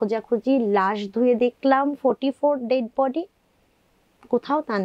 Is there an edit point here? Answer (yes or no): no